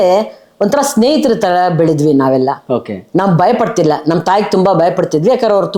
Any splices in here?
no; 0 cuts

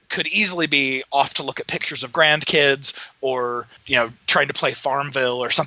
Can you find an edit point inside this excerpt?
yes; 1 cut; at 3.7 s

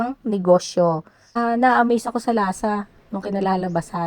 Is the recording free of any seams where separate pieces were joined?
no; 1 cut; at 1.1 s

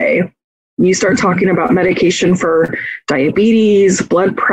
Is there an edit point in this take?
no; 0 cuts

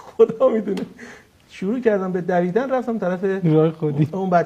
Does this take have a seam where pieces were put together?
no; 0 cuts

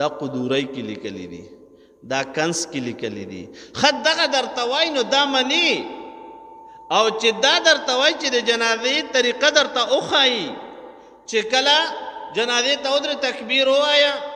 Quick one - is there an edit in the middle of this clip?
no; 0 cuts

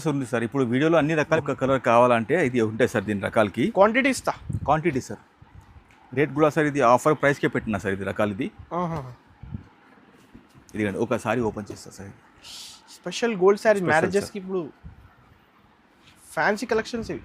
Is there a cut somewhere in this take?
yes; 1 cut; at 1.4 s

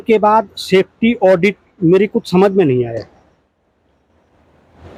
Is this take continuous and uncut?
yes; 0 cuts

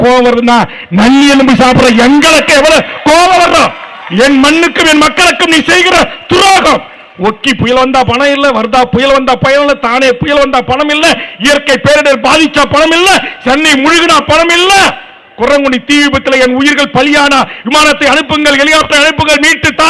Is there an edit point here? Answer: no; 0 cuts

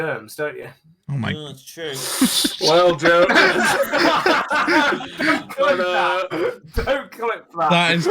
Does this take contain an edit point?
no; 0 cuts

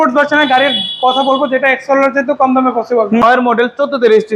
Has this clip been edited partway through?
yes; 1 cut; at 3.2 s

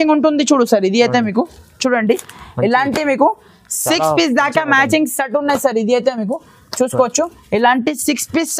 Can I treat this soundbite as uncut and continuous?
yes; 0 cuts

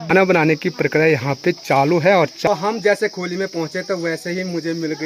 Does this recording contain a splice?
yes; 1 cut; at 2.5 s

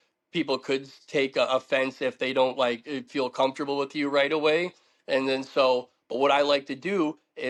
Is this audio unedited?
yes; 0 cuts

